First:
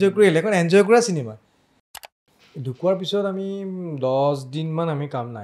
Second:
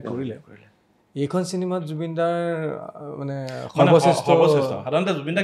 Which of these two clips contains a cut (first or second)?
first